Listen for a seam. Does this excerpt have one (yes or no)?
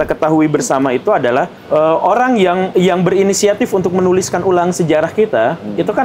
yes